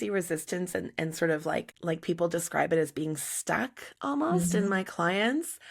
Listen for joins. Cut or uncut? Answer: cut